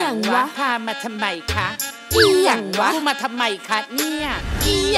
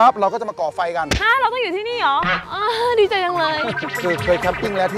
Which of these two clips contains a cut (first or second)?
second